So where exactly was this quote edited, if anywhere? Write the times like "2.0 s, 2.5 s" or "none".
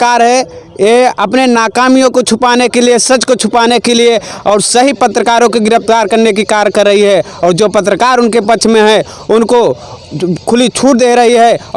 none